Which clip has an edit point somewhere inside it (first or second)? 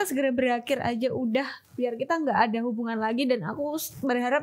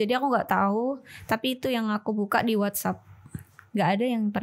first